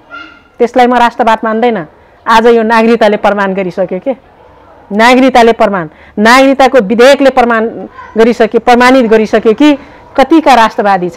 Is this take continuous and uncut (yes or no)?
yes